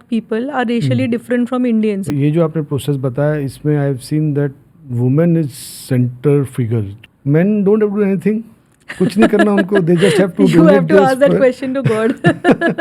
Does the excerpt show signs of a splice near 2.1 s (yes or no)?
yes